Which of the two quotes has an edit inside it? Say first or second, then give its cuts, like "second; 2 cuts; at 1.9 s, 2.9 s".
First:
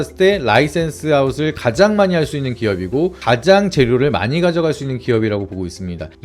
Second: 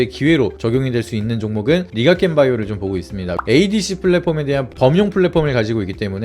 second; 1 cut; at 3.3 s